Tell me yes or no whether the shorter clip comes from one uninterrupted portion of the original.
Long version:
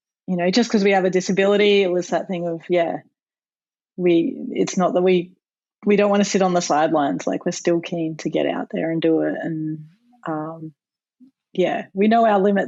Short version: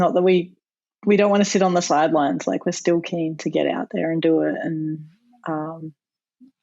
yes